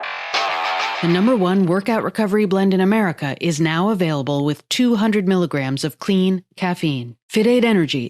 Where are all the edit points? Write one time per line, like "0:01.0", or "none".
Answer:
0:01.0